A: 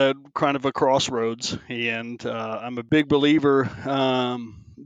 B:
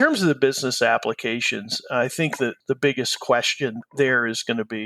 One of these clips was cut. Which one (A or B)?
B